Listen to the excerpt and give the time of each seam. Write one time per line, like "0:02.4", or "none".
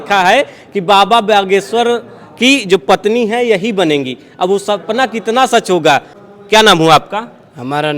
none

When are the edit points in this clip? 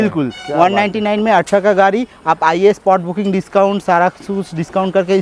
none

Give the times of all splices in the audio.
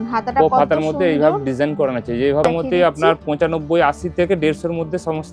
0:02.4

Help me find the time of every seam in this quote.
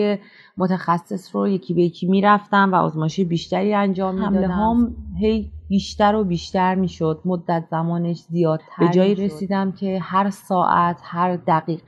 0:04.2
0:08.7

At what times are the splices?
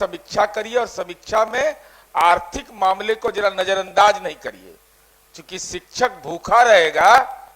none

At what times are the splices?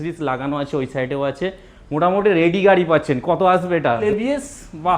0:04.0

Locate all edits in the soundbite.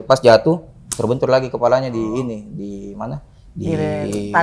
none

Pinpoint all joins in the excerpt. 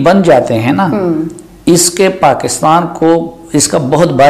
none

